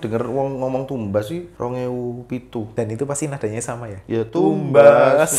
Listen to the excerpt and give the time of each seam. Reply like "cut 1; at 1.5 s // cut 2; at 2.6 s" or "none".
cut 1; at 1.5 s // cut 2; at 2.7 s